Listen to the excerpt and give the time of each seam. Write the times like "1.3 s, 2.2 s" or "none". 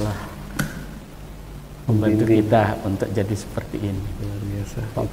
none